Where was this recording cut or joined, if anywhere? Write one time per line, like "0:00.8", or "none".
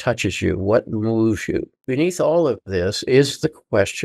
0:01.8